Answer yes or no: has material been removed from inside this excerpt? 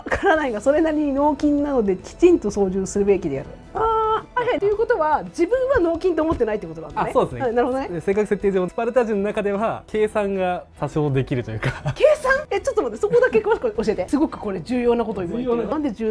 yes